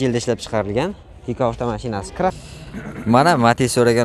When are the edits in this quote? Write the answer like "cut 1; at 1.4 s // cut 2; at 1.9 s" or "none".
cut 1; at 2.3 s

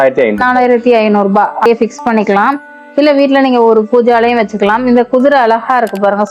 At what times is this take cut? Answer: cut 1; at 1.7 s

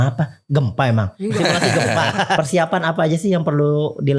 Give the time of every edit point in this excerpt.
cut 1; at 2.4 s

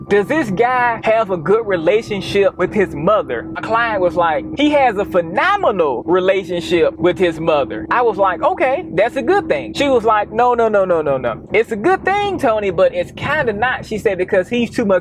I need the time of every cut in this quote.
cut 1; at 1.0 s // cut 2; at 2.6 s

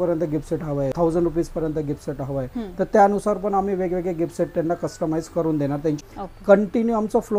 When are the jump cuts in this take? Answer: cut 1; at 0.9 s // cut 2; at 6.0 s

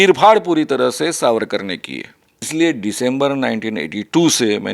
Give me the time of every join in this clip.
cut 1; at 2.5 s

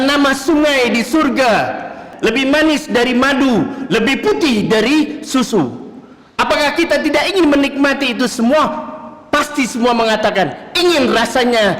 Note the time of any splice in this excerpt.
cut 1; at 2.0 s

